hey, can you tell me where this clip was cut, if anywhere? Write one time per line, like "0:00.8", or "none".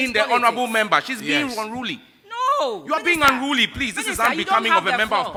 none